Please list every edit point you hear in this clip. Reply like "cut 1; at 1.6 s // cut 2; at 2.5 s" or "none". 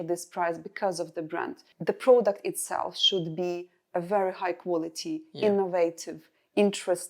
cut 1; at 1.7 s